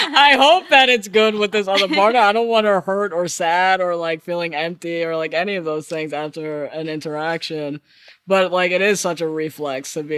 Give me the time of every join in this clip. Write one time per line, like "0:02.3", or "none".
none